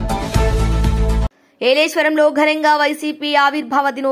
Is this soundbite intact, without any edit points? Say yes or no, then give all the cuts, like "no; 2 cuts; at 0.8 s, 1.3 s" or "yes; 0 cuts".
no; 1 cut; at 1.2 s